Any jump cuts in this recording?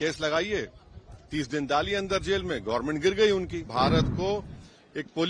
yes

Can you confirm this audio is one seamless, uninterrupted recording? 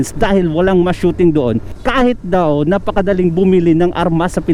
yes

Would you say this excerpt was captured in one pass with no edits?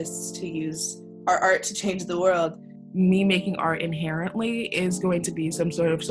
no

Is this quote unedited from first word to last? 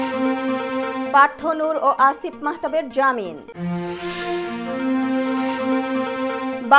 no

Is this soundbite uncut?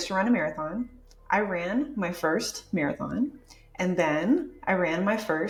yes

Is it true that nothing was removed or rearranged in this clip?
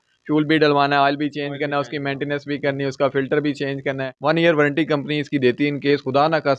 no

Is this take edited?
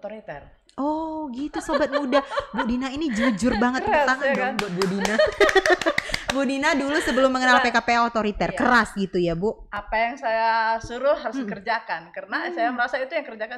no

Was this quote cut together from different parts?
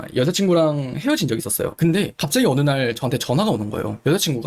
no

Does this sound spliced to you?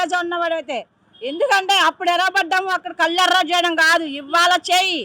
no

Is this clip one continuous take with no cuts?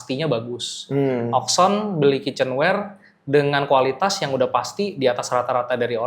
yes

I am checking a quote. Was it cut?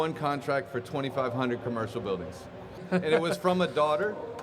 yes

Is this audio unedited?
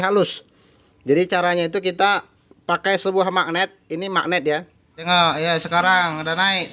no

